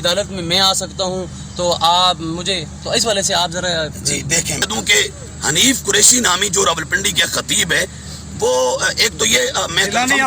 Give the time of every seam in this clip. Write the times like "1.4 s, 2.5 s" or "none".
4.6 s